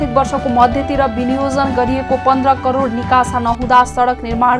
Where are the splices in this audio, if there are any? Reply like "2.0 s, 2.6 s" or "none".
none